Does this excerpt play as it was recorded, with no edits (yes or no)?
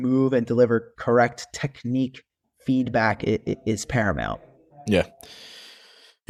yes